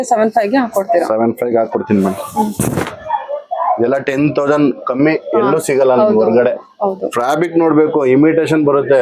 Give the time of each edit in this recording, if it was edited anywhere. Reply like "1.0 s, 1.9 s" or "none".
none